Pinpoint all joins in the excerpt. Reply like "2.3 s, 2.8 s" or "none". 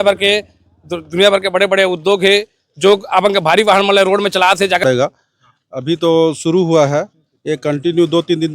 4.8 s